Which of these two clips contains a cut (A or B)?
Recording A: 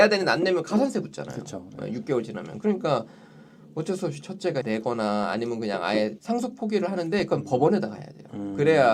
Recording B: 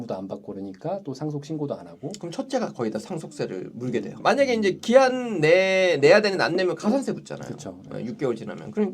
B